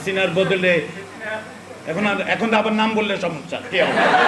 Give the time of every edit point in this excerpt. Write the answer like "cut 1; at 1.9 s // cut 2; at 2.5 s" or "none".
none